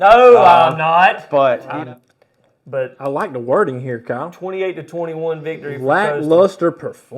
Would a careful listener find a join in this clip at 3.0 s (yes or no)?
no